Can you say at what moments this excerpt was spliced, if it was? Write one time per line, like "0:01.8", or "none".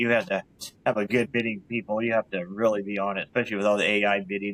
none